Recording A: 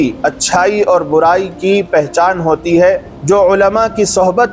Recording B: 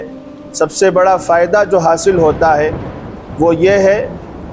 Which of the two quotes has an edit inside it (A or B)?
A